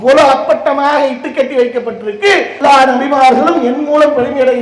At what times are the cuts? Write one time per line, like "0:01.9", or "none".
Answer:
0:02.5